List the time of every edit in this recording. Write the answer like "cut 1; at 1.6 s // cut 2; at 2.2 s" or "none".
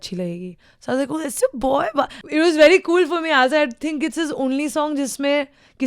cut 1; at 2.2 s